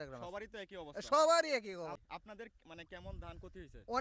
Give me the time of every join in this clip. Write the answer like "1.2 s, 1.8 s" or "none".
2.0 s